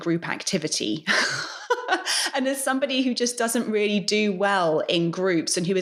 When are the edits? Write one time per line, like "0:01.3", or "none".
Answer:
none